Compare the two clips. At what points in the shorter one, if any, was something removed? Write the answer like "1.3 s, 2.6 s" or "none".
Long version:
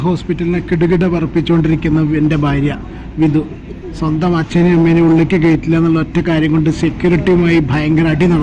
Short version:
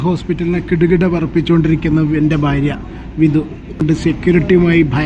3.8 s

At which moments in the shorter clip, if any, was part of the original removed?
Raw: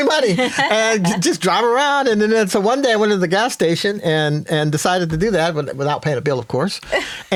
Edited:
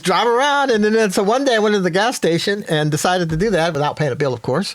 2.6 s, 3.7 s

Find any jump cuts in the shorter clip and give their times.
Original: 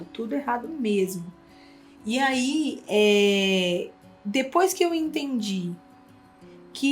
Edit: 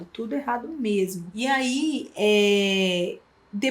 1.2 s

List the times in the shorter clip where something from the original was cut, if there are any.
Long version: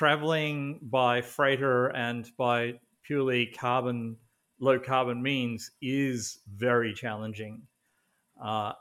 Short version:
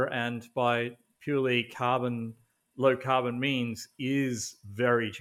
none

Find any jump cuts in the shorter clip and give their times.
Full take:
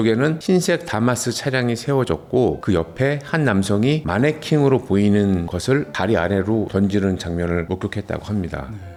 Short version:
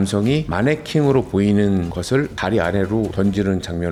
none

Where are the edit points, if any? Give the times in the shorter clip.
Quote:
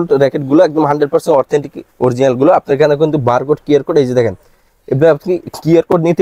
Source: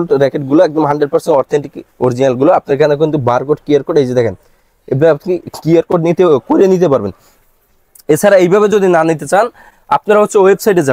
none

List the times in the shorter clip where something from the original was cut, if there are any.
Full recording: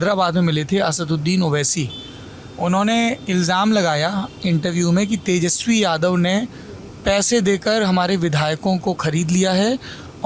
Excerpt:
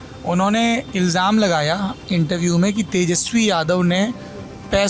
none

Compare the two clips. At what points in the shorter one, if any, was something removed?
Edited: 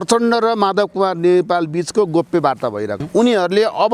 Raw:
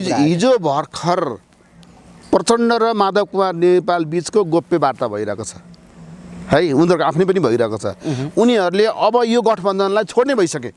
3.0 s

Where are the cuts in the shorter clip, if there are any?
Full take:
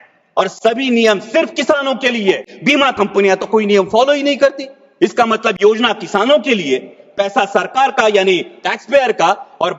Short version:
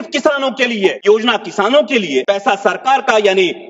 1.0 s, 2.2 s

